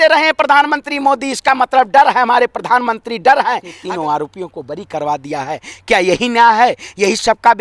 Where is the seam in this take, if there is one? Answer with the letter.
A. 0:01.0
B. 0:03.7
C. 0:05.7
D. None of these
B